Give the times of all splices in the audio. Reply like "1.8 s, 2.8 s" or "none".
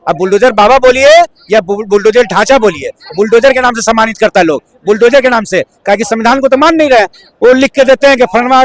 none